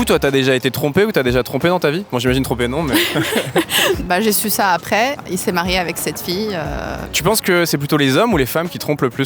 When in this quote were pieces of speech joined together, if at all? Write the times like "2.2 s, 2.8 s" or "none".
4.0 s, 7.1 s